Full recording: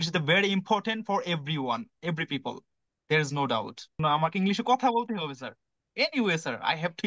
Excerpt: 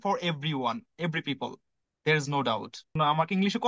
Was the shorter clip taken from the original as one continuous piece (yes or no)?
yes